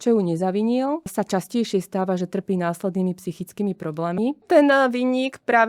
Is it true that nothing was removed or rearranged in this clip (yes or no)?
no